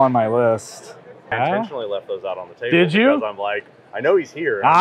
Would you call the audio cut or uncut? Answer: cut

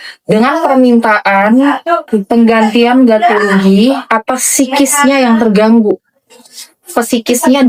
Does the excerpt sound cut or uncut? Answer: uncut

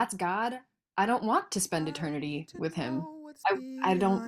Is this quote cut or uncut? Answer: cut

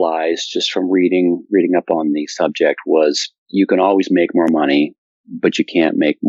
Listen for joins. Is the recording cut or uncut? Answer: uncut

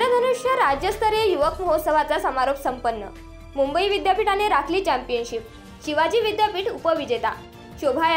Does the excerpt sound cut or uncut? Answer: uncut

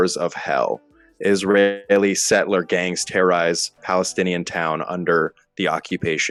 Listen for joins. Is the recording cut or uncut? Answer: uncut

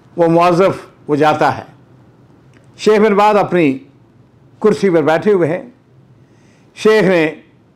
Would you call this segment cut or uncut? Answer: uncut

